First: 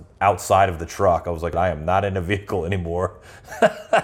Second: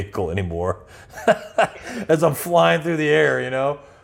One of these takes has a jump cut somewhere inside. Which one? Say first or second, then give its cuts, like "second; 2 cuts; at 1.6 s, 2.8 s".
first; 1 cut; at 1.4 s